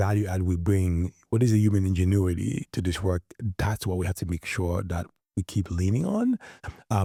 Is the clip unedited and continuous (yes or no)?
yes